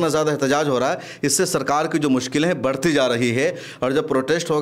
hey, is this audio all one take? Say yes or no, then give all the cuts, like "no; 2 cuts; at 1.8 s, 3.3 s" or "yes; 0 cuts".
yes; 0 cuts